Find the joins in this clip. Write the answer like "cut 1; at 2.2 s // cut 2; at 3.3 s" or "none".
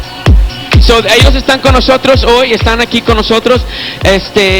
cut 1; at 2.2 s